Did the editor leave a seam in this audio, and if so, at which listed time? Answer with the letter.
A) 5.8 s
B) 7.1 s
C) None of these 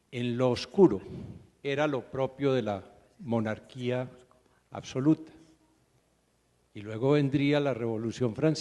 B